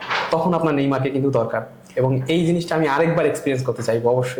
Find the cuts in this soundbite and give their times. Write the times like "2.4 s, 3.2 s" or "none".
none